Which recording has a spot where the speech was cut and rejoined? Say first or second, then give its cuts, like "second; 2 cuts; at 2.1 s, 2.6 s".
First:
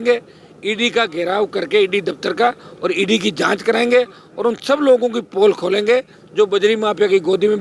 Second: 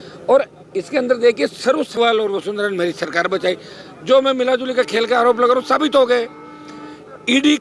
second; 1 cut; at 1.9 s